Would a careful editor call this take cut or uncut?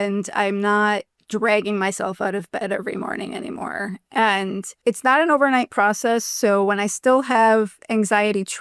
cut